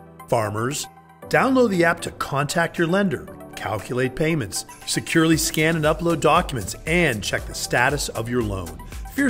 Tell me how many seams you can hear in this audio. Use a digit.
0